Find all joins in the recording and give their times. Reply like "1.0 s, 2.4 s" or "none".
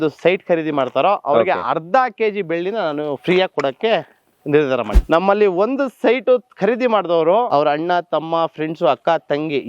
5.0 s, 7.5 s